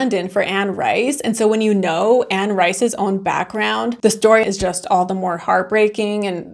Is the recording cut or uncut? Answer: cut